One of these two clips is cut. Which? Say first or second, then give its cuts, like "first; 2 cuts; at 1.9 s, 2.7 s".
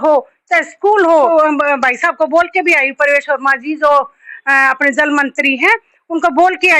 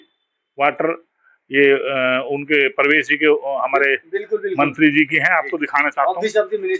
first; 1 cut; at 1.3 s